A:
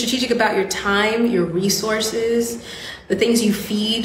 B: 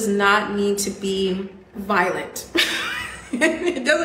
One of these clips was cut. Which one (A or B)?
B